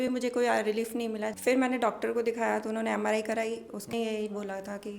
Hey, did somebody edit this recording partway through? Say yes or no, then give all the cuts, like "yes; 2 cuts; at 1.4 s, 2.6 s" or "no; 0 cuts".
yes; 2 cuts; at 1.3 s, 3.9 s